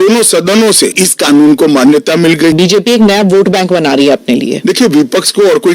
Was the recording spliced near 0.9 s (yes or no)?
yes